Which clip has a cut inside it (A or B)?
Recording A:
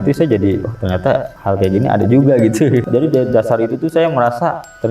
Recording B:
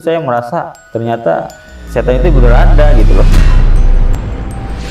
A